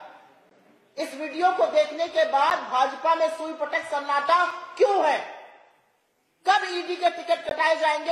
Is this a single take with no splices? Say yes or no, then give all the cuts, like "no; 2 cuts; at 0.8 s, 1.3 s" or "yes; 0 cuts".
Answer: yes; 0 cuts